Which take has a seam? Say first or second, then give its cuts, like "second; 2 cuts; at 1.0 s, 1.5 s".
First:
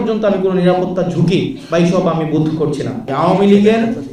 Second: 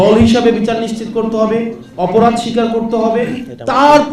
first; 1 cut; at 3.1 s